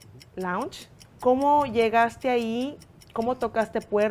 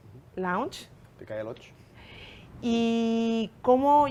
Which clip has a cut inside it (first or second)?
first